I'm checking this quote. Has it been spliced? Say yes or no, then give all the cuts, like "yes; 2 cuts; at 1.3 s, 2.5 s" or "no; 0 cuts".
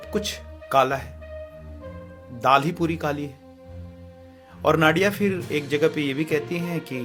no; 0 cuts